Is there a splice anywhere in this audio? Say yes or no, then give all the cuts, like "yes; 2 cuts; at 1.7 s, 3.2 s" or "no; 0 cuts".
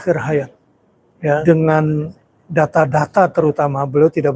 yes; 1 cut; at 1.4 s